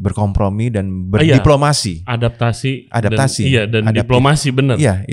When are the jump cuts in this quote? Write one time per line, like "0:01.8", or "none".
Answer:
none

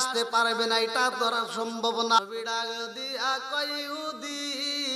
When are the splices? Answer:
0:02.2

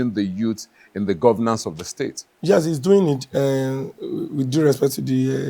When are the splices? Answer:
none

